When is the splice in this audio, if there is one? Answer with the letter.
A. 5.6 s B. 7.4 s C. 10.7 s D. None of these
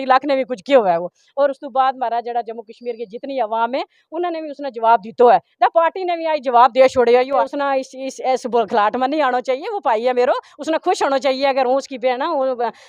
B